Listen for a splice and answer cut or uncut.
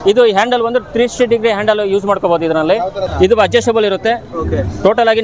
cut